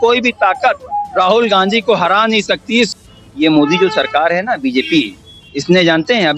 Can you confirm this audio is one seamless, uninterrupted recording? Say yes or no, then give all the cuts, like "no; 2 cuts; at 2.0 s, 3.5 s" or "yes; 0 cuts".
no; 1 cut; at 2.9 s